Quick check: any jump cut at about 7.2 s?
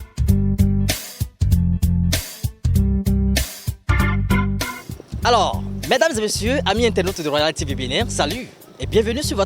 no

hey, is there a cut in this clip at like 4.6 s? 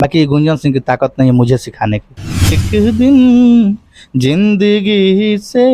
no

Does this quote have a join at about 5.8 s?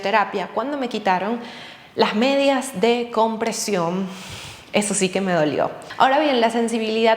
yes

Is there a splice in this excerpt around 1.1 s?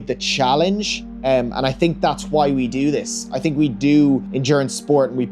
no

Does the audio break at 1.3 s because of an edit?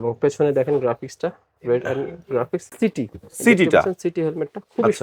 no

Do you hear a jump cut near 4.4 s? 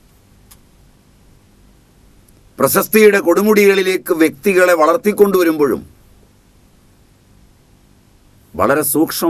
no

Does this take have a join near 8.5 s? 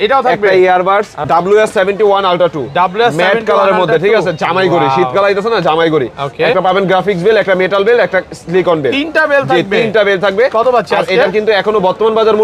no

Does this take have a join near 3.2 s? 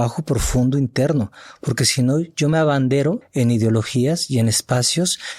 yes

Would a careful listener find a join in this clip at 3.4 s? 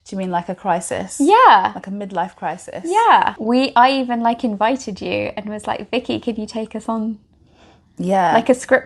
yes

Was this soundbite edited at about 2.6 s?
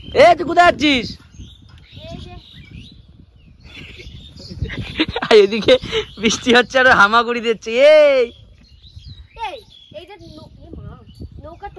no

